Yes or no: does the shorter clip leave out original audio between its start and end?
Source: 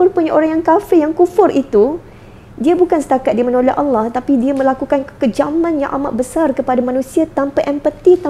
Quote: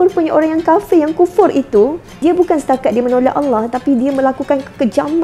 yes